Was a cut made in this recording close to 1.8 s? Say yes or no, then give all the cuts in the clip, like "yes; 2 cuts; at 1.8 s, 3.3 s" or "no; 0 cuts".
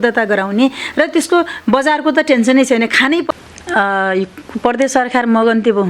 no; 1 cut; at 3.3 s